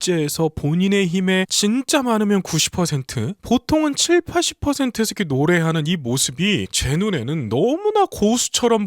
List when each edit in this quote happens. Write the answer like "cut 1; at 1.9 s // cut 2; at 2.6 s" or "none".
cut 1; at 6.8 s